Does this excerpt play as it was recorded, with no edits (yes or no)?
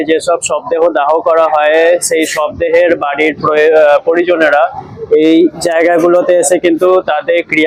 yes